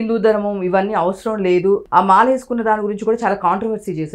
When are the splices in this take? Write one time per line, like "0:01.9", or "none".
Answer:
0:01.8